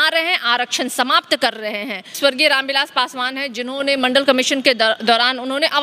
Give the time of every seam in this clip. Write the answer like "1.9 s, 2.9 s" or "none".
2.2 s